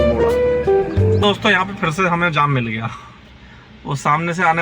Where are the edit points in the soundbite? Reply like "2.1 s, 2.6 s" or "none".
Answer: 1.2 s